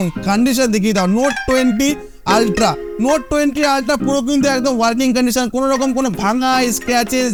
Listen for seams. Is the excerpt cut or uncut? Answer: uncut